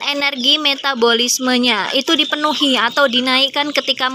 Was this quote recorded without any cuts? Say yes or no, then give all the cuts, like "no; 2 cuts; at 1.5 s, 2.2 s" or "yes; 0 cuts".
yes; 0 cuts